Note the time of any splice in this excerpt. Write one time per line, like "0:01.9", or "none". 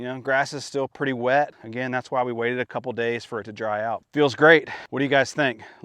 0:01.6
0:04.1
0:04.8